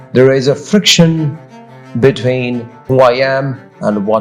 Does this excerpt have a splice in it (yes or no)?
no